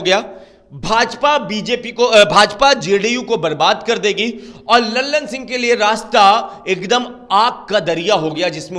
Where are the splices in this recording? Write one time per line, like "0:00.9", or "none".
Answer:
none